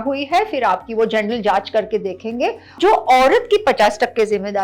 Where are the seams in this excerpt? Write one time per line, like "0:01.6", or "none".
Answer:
0:02.7